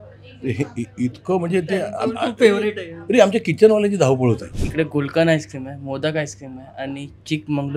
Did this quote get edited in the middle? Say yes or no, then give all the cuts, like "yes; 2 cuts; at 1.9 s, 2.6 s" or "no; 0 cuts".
yes; 1 cut; at 4.5 s